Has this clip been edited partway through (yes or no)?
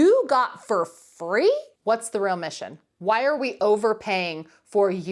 yes